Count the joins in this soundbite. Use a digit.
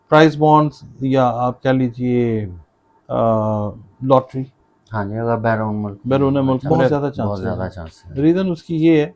1